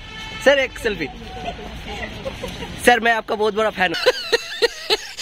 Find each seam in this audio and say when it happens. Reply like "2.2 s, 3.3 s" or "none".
4.0 s